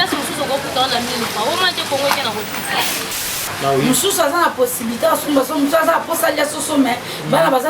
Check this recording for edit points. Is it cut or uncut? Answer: cut